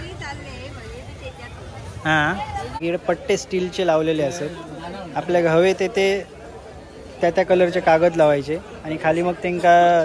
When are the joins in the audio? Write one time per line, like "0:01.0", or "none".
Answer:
0:02.8